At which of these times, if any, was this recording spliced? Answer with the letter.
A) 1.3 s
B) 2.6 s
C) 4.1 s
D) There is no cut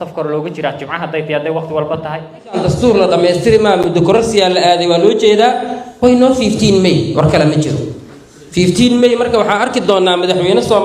B